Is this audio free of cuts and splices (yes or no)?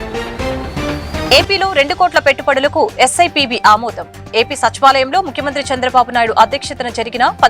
no